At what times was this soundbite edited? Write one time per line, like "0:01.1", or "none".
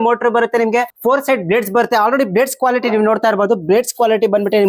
0:00.9